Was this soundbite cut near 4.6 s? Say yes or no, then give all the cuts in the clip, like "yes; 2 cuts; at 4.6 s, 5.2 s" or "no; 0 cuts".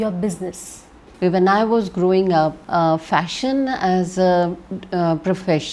no; 2 cuts; at 1.0 s, 2.6 s